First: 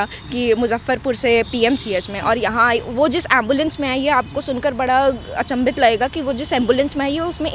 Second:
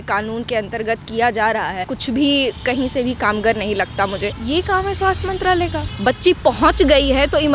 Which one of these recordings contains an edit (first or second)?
second